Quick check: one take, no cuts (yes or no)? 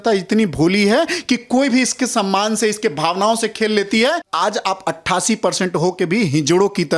no